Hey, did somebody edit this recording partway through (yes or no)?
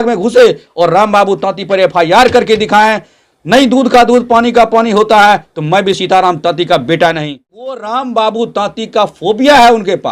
yes